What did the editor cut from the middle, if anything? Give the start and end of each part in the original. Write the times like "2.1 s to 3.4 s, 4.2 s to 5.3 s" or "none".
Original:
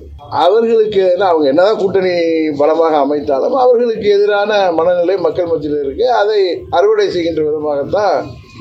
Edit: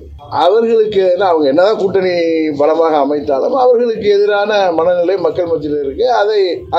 none